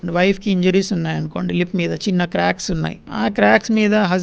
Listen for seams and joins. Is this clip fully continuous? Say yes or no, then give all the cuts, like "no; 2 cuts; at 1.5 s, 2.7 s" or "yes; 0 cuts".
no; 1 cut; at 3.0 s